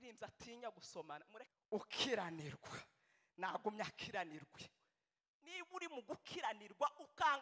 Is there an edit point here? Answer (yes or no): yes